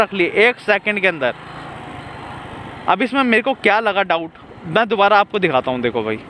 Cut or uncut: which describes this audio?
uncut